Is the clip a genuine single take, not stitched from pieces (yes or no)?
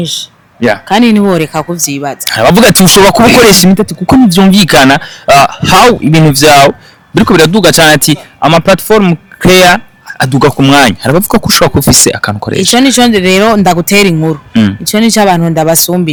yes